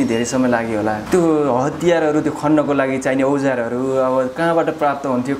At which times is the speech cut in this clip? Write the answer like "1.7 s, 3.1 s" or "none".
1.0 s